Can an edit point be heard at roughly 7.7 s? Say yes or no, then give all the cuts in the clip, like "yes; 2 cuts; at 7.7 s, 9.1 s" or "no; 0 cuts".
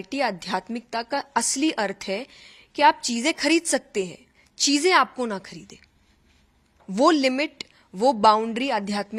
no; 0 cuts